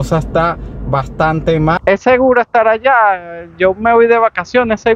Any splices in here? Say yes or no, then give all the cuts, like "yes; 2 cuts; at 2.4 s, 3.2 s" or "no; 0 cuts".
yes; 1 cut; at 1.8 s